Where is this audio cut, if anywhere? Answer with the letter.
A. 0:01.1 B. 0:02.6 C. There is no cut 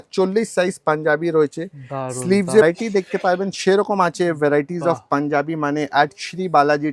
B